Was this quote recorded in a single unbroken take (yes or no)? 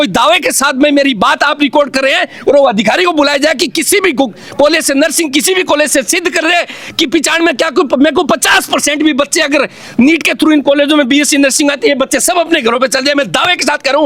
yes